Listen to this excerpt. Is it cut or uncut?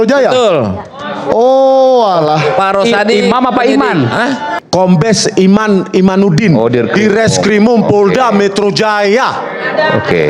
cut